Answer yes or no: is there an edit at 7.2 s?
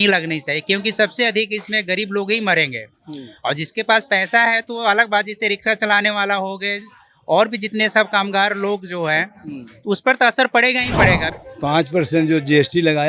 no